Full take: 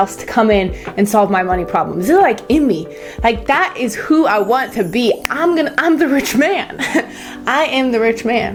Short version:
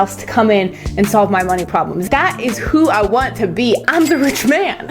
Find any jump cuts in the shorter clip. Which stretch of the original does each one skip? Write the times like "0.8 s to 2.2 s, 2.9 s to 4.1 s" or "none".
2.0 s to 3.4 s, 5.2 s to 5.8 s